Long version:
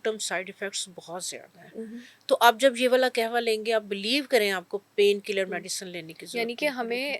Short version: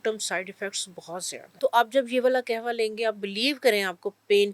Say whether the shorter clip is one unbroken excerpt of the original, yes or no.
no